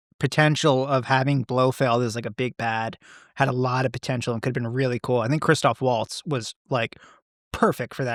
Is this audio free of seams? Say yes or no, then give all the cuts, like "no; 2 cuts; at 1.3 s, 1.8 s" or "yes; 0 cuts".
yes; 0 cuts